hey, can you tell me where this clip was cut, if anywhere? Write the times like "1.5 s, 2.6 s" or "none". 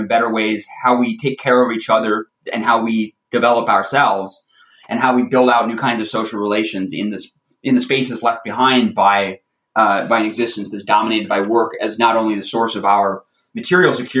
2.3 s